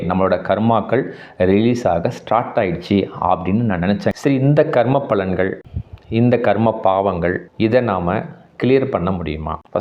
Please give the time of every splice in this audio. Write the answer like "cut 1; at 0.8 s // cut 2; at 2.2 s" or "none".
cut 1; at 4.1 s